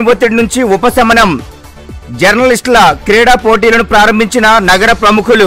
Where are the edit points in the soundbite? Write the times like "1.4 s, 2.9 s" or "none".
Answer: none